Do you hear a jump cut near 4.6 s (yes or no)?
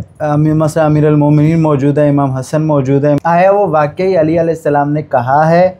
no